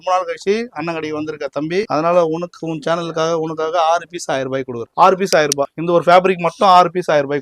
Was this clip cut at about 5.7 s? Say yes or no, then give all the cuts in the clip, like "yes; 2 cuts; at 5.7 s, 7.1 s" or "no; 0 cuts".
yes; 3 cuts; at 1.9 s, 4.8 s, 5.7 s